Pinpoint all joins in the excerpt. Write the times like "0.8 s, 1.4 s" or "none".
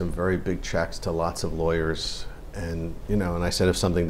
none

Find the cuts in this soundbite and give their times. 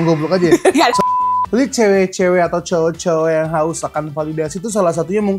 1.0 s

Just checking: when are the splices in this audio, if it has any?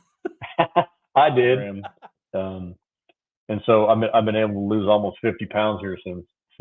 1.8 s

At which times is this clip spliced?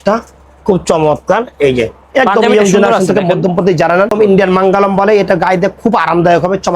4.1 s

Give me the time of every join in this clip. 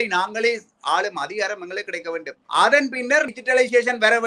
2.4 s, 3.3 s

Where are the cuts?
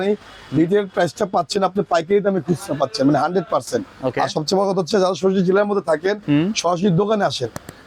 none

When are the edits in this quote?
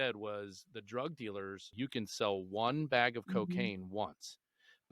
1.7 s

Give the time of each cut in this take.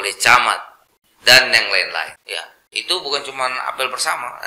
2.2 s

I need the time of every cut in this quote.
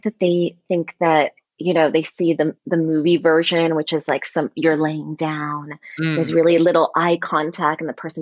1.5 s

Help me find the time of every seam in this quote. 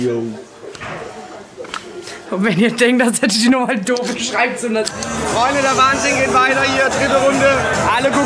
5.2 s

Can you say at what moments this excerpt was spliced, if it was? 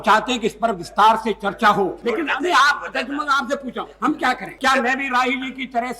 2.0 s, 4.6 s

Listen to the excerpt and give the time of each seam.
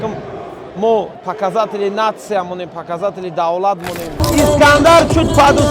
1.3 s, 4.2 s

